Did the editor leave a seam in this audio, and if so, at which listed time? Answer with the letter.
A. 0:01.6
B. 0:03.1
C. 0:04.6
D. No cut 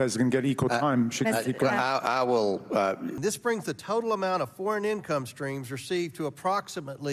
B